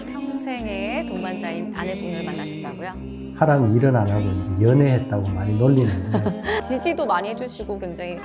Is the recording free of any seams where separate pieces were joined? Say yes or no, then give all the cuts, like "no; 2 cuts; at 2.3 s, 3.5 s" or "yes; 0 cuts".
no; 1 cut; at 6.5 s